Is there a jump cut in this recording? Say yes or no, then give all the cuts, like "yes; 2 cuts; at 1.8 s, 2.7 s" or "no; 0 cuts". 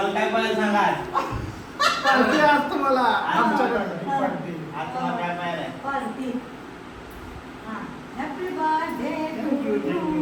no; 0 cuts